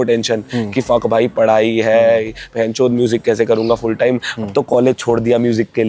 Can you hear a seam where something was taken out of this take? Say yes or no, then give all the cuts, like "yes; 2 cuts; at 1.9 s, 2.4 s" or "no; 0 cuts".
no; 0 cuts